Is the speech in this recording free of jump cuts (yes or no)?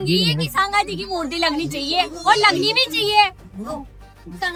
yes